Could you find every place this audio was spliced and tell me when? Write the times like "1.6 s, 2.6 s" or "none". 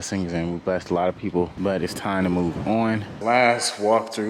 1.5 s, 3.1 s